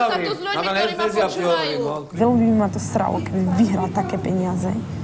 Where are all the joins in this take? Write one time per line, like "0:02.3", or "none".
0:02.1